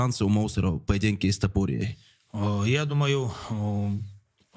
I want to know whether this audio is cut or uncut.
uncut